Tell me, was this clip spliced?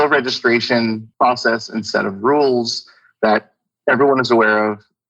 yes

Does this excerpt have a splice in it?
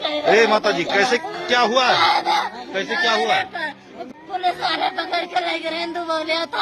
yes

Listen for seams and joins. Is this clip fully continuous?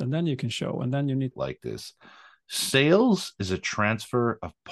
no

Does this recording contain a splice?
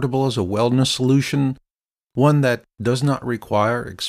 no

